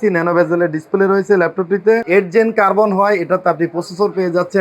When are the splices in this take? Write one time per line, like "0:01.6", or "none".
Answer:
0:02.0